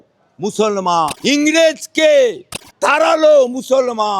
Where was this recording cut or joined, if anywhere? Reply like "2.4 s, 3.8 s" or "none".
1.3 s, 3.0 s